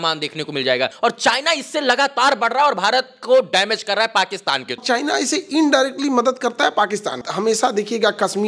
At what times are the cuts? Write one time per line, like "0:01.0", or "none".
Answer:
0:00.9
0:04.8
0:07.3